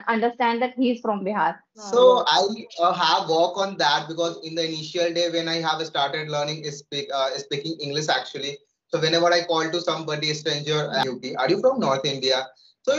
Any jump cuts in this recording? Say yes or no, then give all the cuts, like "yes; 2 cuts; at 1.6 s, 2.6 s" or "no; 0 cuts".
yes; 2 cuts; at 1.9 s, 11.0 s